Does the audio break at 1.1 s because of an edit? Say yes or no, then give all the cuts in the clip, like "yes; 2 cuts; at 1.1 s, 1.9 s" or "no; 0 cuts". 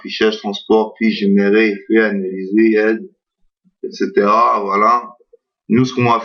yes; 1 cut; at 1.1 s